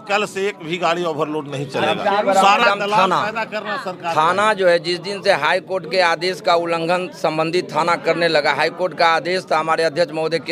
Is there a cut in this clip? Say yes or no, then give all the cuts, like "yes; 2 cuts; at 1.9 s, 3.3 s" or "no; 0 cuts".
no; 0 cuts